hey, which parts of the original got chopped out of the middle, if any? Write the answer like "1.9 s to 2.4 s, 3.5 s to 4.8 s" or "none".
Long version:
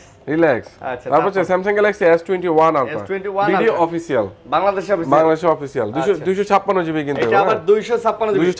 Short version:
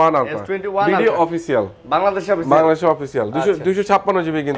none